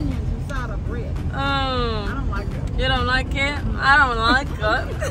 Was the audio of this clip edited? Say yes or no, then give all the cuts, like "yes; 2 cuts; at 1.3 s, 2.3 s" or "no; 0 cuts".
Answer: no; 0 cuts